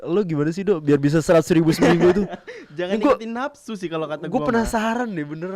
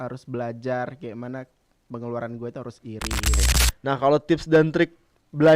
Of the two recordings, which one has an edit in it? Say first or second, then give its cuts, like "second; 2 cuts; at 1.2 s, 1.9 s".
second; 1 cut; at 3.3 s